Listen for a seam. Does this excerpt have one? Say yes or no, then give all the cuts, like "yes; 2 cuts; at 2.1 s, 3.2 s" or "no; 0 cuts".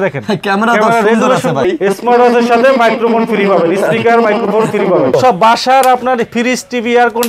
yes; 2 cuts; at 1.7 s, 5.1 s